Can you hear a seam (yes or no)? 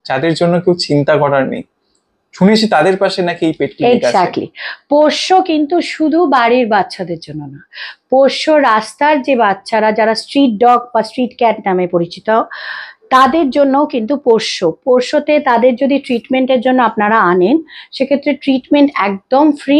no